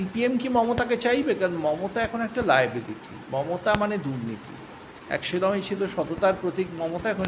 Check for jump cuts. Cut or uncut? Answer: uncut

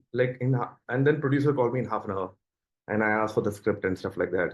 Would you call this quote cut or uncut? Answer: uncut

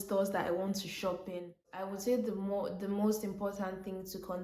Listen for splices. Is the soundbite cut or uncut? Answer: cut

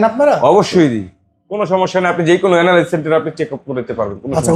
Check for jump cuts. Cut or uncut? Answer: uncut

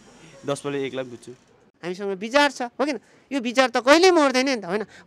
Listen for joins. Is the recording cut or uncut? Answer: cut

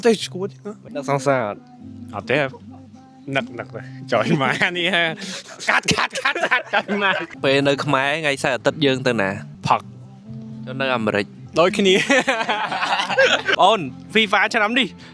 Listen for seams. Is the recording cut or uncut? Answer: cut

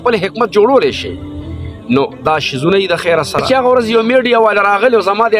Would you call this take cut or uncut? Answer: cut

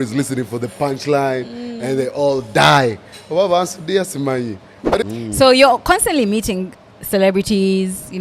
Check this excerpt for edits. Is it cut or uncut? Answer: cut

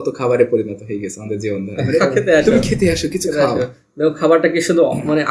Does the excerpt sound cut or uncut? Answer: cut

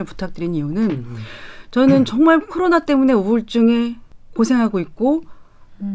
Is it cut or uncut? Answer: uncut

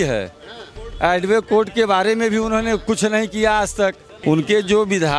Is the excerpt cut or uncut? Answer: cut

